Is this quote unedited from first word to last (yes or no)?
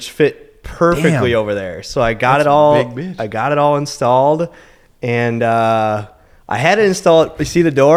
yes